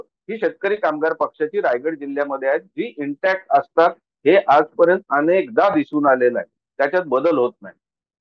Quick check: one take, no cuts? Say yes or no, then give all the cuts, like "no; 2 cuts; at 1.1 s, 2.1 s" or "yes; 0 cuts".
yes; 0 cuts